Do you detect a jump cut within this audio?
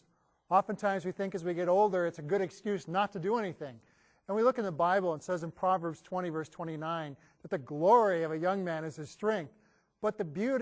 no; 0 cuts

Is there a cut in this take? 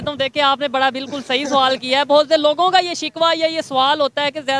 no; 0 cuts

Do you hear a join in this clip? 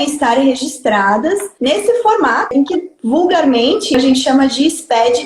yes; 3 cuts; at 1.5 s, 2.5 s, 3.9 s

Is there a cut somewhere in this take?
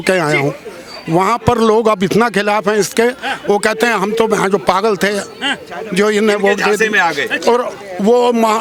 no; 0 cuts

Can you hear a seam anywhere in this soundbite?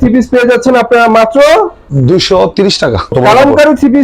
yes; 2 cuts; at 1.8 s, 3.1 s

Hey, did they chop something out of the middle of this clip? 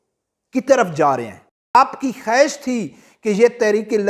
yes; 1 cut; at 1.8 s

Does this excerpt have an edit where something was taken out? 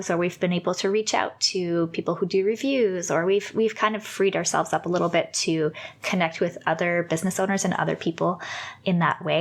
no; 0 cuts

